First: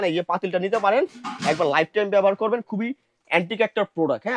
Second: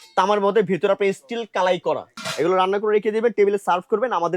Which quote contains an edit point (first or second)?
second